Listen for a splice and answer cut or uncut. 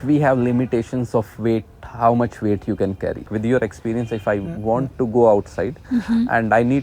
cut